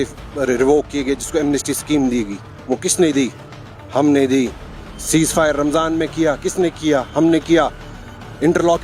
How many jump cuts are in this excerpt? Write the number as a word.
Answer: zero